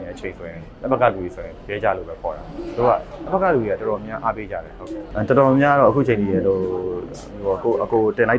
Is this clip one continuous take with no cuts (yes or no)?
no